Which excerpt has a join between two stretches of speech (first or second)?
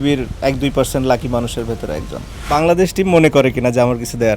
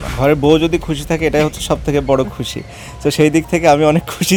first